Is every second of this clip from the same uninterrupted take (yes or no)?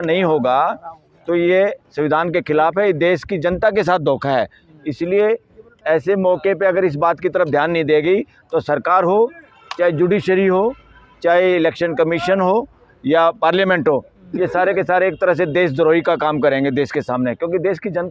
yes